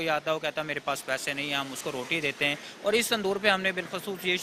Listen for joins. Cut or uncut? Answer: uncut